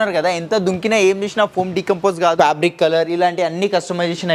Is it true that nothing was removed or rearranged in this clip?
no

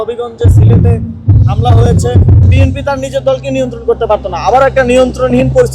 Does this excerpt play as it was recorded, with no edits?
no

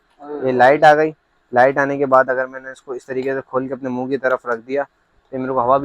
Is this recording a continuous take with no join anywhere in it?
yes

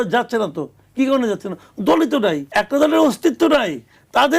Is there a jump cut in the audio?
yes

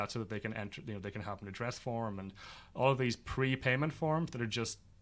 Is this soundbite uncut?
yes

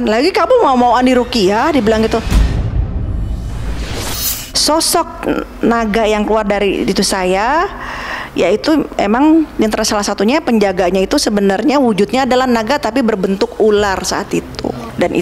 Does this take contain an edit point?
yes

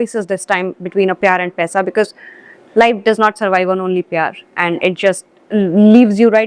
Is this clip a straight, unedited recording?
yes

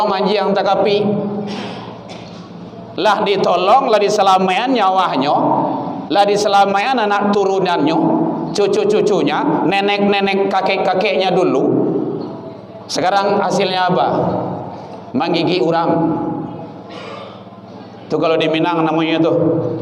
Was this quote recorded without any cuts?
yes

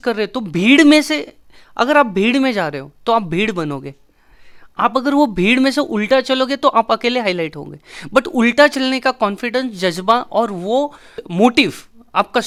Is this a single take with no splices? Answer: yes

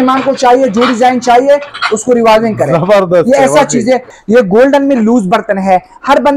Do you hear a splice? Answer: yes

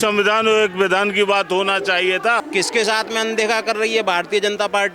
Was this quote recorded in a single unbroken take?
no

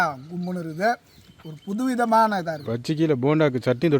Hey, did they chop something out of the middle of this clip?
yes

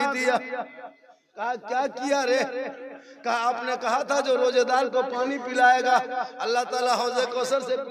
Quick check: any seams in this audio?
no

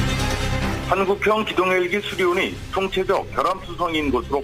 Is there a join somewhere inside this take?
no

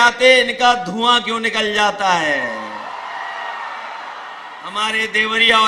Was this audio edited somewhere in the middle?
no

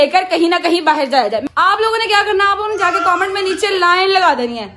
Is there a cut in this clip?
yes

